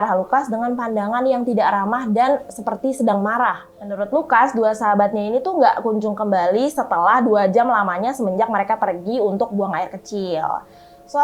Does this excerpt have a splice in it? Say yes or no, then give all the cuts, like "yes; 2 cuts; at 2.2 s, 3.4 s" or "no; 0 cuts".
yes; 1 cut; at 3.7 s